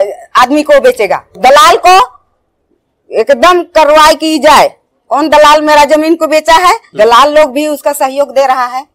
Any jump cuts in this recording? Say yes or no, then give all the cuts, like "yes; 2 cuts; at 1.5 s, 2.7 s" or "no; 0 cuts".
yes; 2 cuts; at 1.4 s, 6.9 s